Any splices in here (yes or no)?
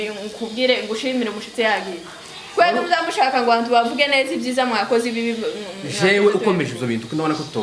no